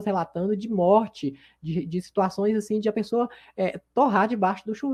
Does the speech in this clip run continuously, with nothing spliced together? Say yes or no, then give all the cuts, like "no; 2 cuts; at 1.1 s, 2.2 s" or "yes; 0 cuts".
yes; 0 cuts